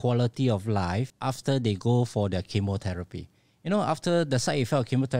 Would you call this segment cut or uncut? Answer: cut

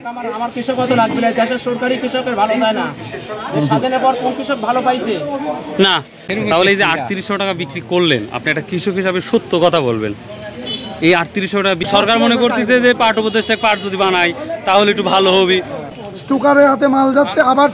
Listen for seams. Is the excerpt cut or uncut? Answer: cut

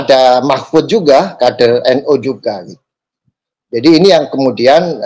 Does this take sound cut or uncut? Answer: uncut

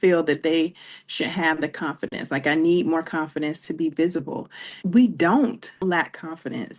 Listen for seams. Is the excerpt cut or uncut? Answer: cut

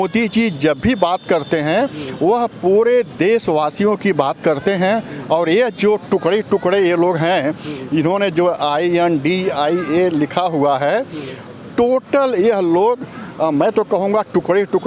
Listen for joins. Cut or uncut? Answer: uncut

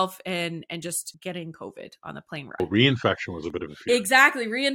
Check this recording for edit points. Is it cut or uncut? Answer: cut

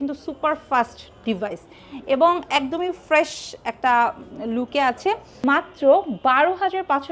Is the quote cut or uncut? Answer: cut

